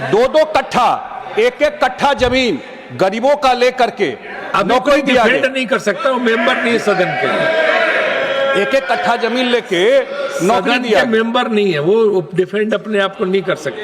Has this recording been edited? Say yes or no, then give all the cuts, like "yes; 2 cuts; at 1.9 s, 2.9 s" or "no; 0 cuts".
no; 0 cuts